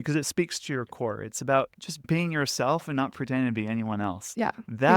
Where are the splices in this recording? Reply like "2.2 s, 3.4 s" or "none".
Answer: 2.0 s